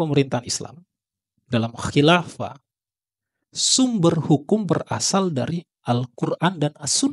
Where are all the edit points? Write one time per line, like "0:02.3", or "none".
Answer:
none